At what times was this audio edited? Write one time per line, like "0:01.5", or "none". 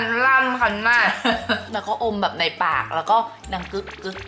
0:01.7